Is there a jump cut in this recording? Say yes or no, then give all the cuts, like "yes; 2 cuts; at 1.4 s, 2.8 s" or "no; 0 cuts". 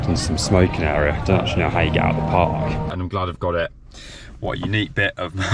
yes; 1 cut; at 2.9 s